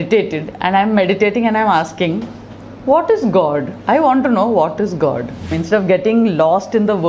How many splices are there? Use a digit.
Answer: 1